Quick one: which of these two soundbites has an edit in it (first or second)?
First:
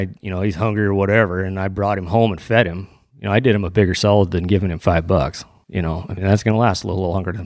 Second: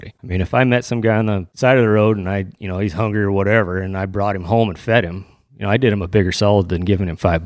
second